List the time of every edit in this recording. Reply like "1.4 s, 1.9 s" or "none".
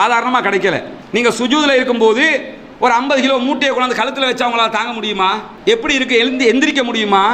0.9 s